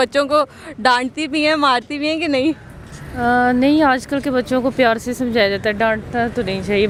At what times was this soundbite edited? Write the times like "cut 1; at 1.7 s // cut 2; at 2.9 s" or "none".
none

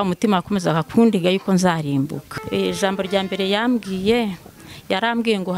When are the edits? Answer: cut 1; at 2.2 s

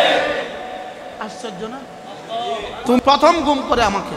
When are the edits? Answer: cut 1; at 3.0 s

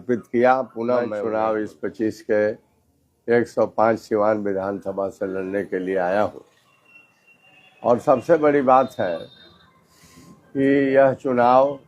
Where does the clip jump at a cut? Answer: cut 1; at 1.1 s

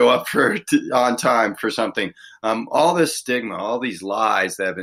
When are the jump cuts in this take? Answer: none

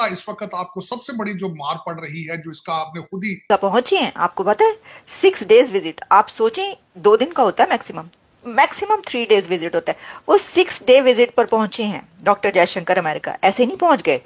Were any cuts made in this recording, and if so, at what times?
cut 1; at 3.5 s

